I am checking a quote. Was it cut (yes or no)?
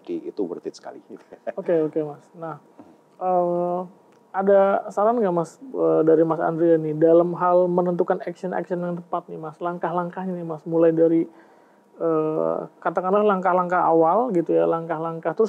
no